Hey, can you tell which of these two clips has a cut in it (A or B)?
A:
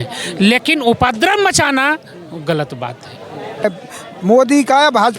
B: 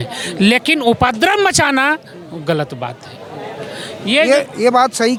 A